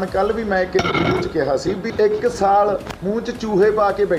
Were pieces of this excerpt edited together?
yes; 2 cuts; at 1.9 s, 2.9 s

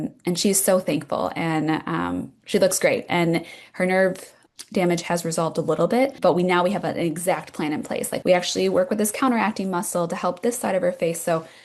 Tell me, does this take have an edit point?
yes; 1 cut; at 8.1 s

